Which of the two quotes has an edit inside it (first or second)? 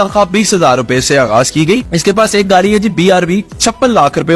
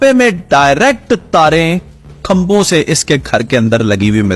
first